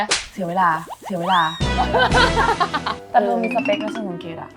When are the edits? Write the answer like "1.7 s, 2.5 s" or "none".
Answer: 2.9 s